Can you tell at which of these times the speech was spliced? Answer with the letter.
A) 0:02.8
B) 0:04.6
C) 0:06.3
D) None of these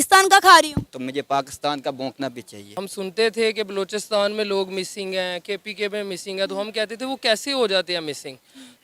A